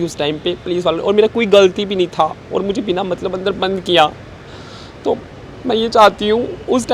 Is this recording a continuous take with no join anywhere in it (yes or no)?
yes